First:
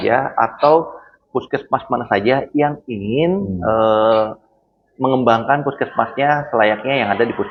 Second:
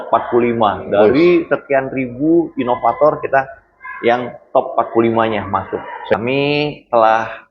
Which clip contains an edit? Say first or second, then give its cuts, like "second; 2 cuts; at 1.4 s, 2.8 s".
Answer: second; 1 cut; at 6.1 s